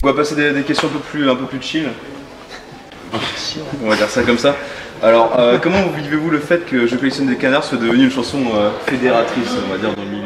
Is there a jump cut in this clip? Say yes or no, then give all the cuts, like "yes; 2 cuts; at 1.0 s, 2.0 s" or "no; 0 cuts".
no; 0 cuts